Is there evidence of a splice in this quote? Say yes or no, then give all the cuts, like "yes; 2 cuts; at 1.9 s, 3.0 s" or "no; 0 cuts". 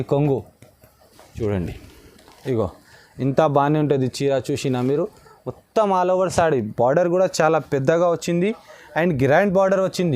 yes; 1 cut; at 1.4 s